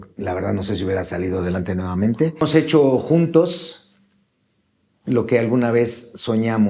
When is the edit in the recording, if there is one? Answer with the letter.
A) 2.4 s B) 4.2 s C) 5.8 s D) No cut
A